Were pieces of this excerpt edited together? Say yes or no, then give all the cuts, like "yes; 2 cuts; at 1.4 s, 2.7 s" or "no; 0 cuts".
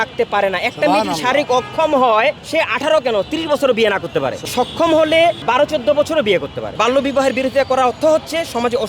yes; 4 cuts; at 2.4 s, 4.5 s, 5.4 s, 6.7 s